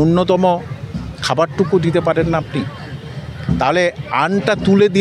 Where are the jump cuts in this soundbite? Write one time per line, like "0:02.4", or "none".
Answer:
none